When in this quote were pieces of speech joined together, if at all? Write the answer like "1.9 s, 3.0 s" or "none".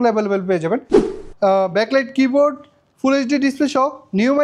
1.0 s